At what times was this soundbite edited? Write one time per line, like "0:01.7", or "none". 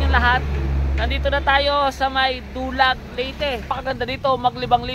0:03.7